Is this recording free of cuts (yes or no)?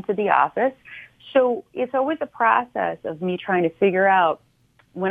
yes